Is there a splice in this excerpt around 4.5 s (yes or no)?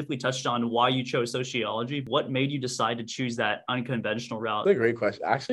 yes